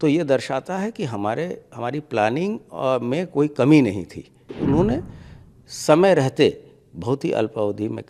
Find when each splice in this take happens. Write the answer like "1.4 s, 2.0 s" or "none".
4.4 s